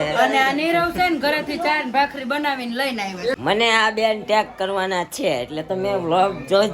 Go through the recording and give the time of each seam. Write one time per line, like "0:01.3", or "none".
0:03.4